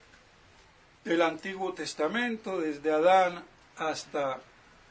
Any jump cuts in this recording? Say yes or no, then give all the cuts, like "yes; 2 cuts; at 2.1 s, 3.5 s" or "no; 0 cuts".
yes; 1 cut; at 3.2 s